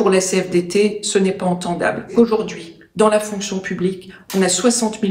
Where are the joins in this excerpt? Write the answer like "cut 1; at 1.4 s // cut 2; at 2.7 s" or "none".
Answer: cut 1; at 2.1 s